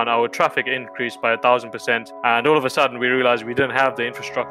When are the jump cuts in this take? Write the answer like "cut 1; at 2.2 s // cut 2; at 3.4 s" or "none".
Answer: cut 1; at 2.1 s